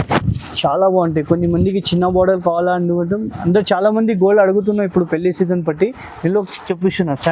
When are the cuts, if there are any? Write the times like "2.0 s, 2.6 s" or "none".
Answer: none